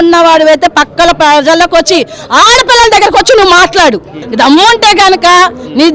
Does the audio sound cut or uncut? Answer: cut